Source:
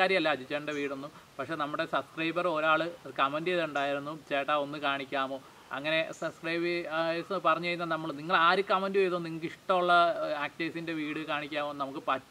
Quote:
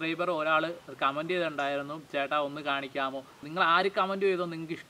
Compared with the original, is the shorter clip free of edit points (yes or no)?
no